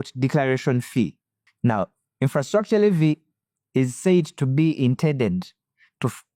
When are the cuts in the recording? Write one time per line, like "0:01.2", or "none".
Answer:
none